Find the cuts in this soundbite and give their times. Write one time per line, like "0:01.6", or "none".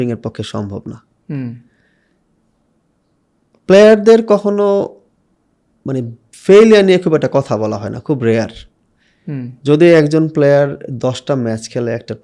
none